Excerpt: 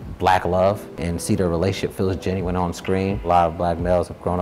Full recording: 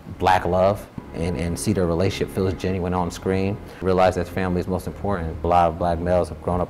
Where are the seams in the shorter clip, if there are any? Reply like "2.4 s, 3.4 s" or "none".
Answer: 1.0 s, 3.2 s